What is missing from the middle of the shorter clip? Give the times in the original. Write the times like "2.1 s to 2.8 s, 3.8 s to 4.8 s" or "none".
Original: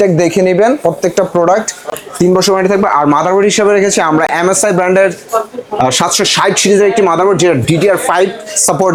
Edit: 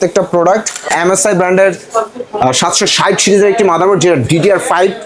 1.9 s to 4.3 s